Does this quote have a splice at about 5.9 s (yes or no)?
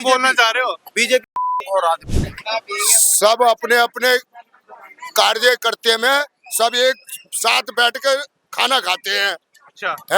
no